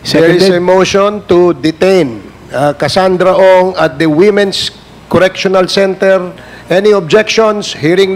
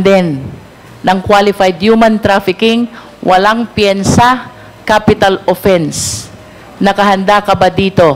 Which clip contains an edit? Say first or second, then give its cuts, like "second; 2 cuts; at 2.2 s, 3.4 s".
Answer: first; 1 cut; at 6.3 s